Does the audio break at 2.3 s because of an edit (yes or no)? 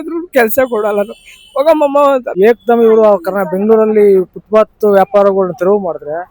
yes